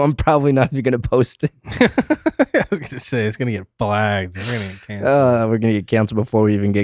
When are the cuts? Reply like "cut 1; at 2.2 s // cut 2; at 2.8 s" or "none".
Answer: none